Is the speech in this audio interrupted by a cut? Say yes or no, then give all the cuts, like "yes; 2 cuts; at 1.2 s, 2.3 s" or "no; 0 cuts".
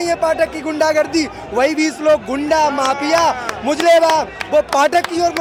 no; 0 cuts